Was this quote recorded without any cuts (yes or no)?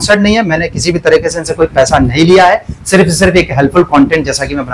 yes